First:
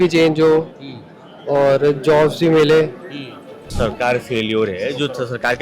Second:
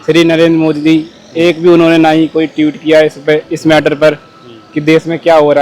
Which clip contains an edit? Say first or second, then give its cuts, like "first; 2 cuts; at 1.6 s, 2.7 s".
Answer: first; 1 cut; at 3.7 s